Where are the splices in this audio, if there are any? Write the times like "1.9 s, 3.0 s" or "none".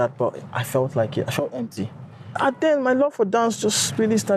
2.2 s

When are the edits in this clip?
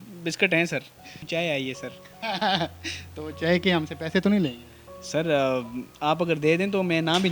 1.2 s

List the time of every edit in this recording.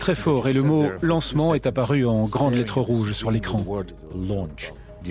none

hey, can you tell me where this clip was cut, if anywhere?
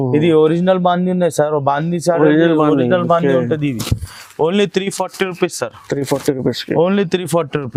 none

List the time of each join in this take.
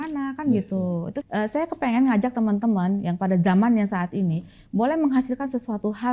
1.2 s

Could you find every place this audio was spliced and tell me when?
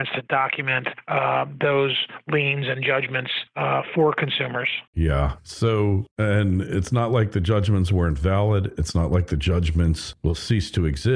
none

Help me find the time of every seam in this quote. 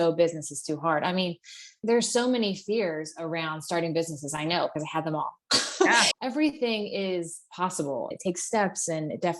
6.1 s, 8.1 s

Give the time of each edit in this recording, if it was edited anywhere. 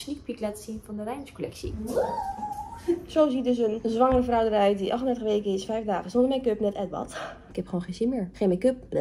1.7 s, 3.1 s, 7.6 s

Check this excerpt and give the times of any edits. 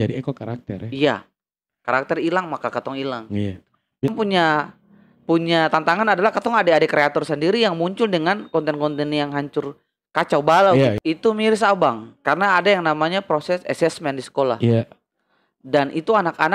4.1 s, 11.0 s

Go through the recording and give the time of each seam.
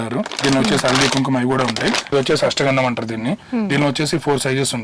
2.0 s

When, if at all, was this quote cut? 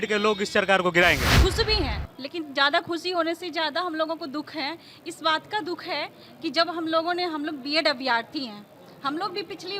1.3 s

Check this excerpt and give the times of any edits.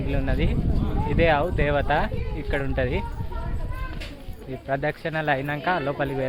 none

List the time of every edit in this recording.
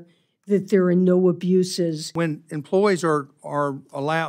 2.1 s

